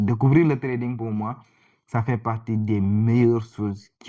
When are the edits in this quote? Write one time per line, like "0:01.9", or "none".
none